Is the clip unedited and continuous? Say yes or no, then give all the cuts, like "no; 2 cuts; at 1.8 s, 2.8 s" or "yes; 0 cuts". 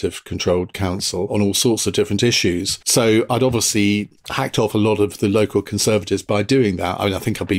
no; 1 cut; at 1.3 s